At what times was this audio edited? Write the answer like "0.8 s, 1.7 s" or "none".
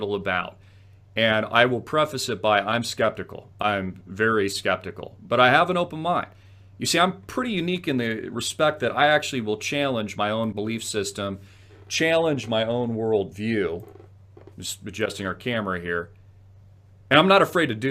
8.4 s